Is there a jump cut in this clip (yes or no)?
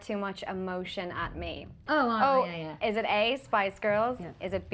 yes